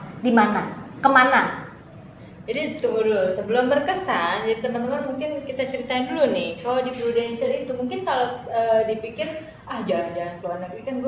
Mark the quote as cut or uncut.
uncut